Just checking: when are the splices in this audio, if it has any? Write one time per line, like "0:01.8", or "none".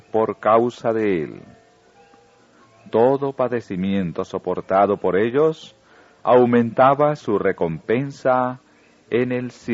none